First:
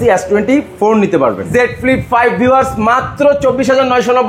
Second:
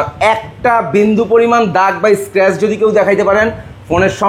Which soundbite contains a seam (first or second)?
first